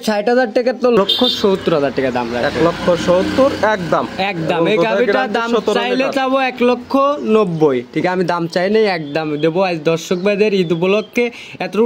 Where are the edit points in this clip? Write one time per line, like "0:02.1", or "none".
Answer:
0:01.0